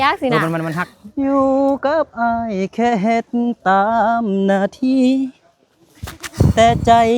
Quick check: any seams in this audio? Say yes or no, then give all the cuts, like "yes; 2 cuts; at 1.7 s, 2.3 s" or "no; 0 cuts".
no; 0 cuts